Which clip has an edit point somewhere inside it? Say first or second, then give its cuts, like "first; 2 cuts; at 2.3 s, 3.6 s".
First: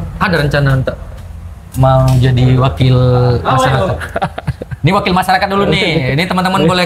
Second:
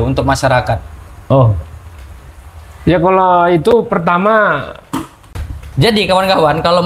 second; 1 cut; at 5.4 s